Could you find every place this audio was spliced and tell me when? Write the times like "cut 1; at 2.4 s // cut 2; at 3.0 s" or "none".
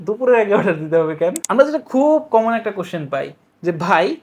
cut 1; at 1.4 s